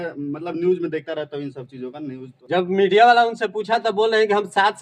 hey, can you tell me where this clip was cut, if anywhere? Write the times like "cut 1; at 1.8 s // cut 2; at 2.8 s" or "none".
cut 1; at 2.3 s